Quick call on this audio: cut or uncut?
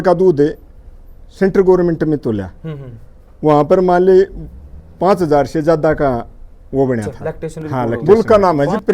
cut